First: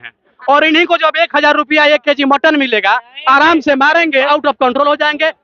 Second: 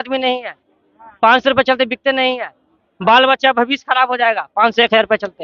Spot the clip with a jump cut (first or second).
first